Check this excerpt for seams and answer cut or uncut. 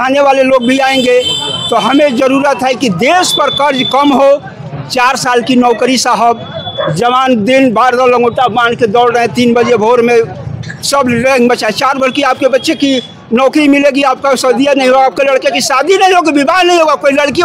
uncut